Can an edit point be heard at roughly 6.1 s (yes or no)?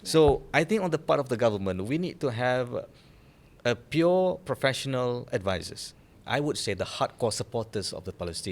yes